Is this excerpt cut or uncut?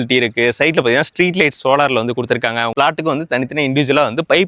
cut